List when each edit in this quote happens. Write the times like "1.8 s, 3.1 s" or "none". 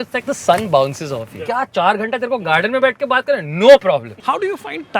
1.3 s, 4.1 s